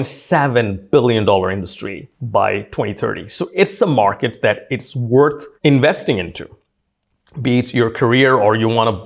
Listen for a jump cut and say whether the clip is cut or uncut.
uncut